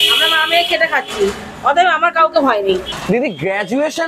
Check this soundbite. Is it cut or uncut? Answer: cut